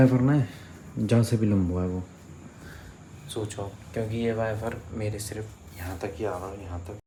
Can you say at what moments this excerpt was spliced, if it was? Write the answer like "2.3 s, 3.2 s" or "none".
none